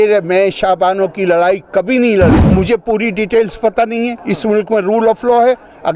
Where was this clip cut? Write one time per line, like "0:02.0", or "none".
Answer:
0:02.4